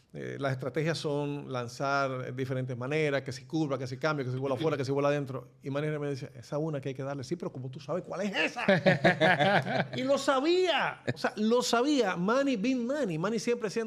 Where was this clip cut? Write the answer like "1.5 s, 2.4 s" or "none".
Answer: none